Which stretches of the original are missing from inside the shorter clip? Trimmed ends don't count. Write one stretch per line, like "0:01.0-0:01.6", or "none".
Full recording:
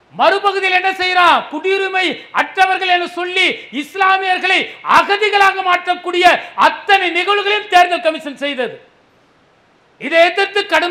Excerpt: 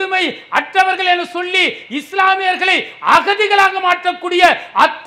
none